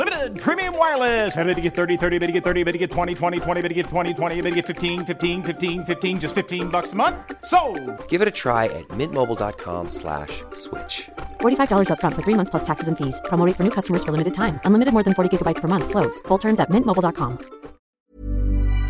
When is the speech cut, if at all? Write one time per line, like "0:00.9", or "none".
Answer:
0:17.9